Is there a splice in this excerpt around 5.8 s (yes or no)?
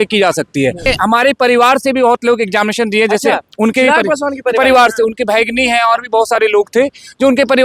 no